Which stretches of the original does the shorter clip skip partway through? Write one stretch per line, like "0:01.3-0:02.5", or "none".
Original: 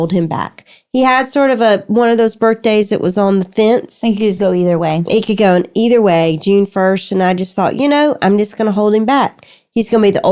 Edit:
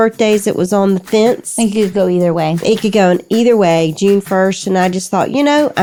none